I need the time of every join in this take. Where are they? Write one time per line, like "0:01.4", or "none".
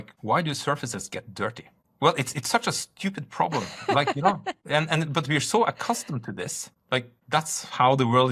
none